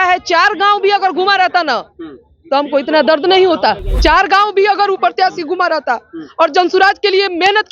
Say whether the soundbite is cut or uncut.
cut